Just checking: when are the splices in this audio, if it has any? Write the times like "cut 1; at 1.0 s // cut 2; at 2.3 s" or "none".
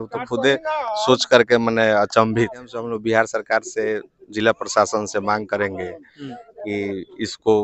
cut 1; at 2.9 s

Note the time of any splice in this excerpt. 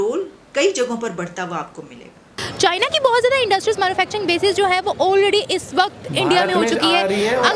cut 1; at 2.4 s

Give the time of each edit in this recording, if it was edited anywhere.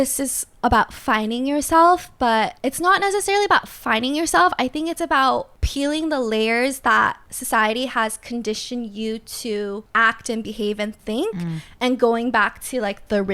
cut 1; at 2.5 s // cut 2; at 5.6 s // cut 3; at 7.3 s // cut 4; at 9.9 s

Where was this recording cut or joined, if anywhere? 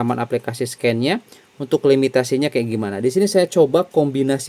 none

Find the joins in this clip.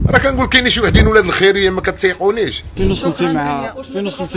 cut 1; at 2.6 s

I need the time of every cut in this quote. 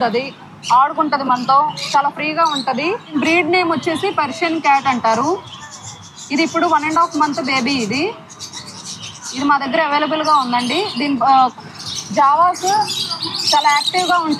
cut 1; at 3.2 s // cut 2; at 11.5 s

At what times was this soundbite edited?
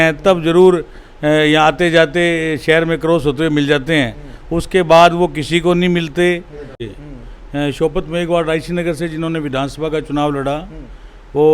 cut 1; at 6.9 s

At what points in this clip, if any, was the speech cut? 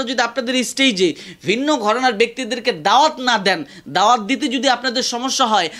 none

